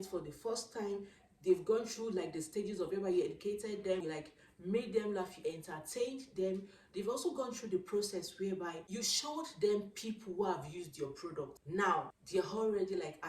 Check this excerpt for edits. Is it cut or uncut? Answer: cut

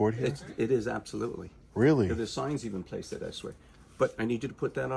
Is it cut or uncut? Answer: uncut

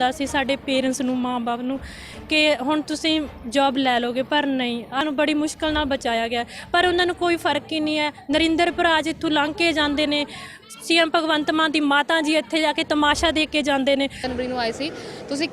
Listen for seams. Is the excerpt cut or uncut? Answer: cut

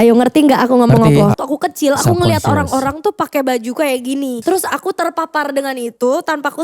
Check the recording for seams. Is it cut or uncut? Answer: cut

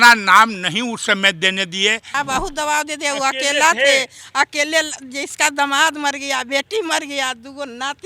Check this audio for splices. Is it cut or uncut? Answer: cut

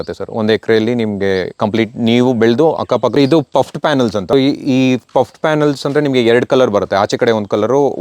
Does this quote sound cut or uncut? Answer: cut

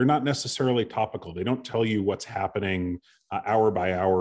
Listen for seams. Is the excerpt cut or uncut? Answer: uncut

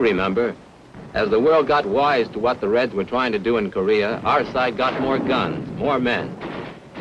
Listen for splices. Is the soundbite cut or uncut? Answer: cut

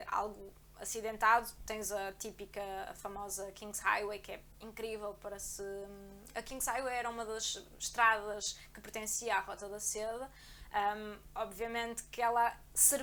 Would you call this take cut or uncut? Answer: uncut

